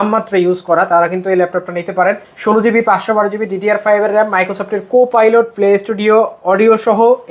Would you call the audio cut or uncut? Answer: cut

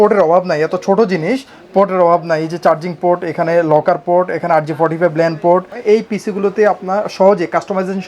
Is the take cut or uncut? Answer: cut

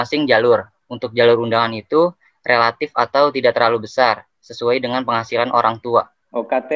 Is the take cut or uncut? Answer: uncut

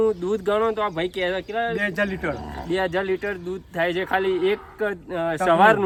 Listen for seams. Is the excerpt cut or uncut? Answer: uncut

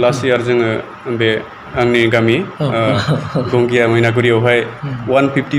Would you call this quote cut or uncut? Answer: uncut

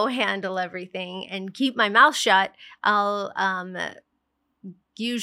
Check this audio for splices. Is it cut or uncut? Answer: uncut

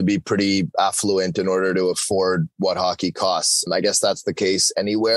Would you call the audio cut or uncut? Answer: cut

